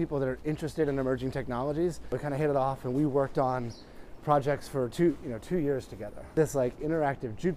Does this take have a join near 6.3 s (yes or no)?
yes